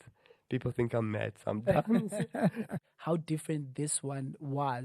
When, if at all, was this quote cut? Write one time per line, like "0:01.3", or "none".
0:02.9